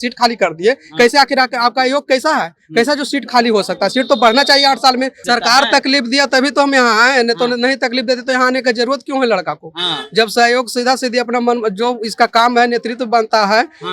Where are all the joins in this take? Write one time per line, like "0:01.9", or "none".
0:05.2

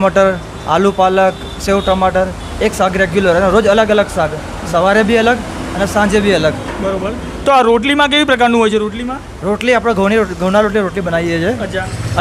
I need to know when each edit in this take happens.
none

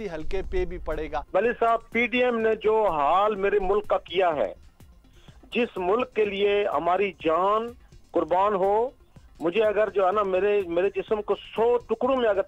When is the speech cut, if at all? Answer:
0:01.1

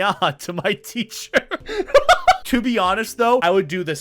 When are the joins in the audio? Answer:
0:02.4

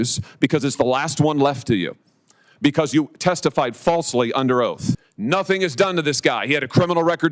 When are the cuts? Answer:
0:05.1

